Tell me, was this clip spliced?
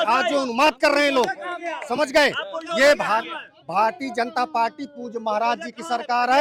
no; 0 cuts

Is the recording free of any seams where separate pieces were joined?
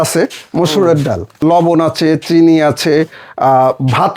no; 1 cut; at 1.4 s

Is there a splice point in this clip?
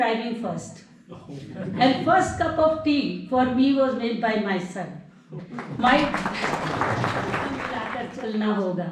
yes; 1 cut; at 7.9 s

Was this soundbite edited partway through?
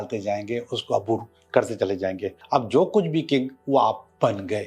yes; 1 cut; at 2.4 s

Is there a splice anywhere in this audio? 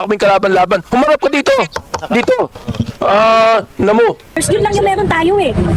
yes; 1 cut; at 4.4 s

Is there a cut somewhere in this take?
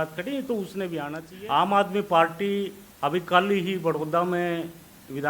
yes; 1 cut; at 1.2 s

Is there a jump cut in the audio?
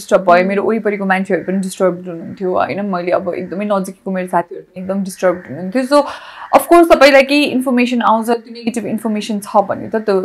no; 0 cuts

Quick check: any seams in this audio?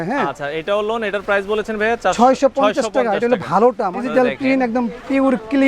yes; 1 cut; at 4.1 s

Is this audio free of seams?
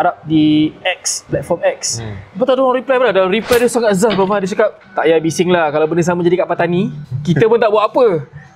no; 2 cuts; at 4.8 s, 7.1 s

